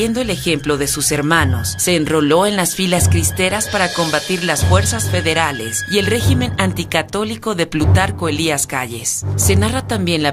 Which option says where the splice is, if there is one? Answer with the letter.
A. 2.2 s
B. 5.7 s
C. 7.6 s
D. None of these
C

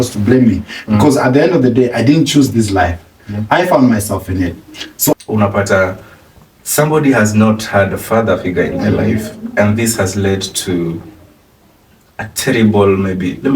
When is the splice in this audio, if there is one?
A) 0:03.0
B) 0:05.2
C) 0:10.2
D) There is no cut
B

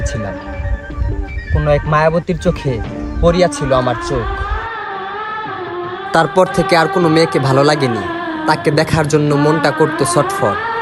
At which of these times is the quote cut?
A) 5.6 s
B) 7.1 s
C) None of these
C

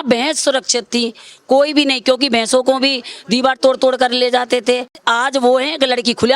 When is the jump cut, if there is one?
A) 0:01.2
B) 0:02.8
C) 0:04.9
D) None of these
C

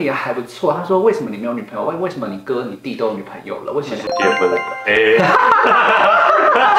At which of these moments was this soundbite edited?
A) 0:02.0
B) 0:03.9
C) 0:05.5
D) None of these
D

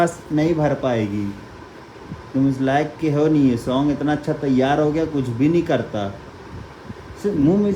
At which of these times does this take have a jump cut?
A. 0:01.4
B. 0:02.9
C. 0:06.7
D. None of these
D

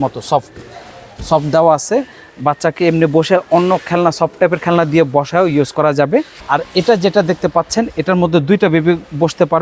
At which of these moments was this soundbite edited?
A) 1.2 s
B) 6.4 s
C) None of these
B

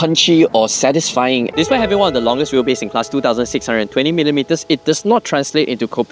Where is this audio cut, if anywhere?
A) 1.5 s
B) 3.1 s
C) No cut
A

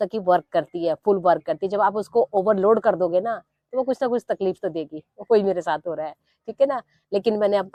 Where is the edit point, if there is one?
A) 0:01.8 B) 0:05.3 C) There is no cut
C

